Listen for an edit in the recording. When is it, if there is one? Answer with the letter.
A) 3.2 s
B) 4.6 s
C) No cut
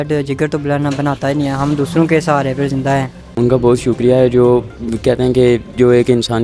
A